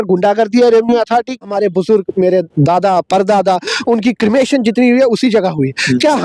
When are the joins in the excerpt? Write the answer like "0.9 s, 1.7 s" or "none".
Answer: 1.4 s